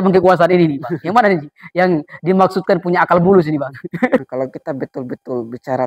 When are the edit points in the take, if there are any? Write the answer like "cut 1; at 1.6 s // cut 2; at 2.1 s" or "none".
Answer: cut 1; at 4.2 s